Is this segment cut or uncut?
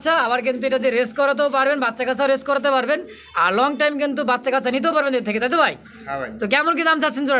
uncut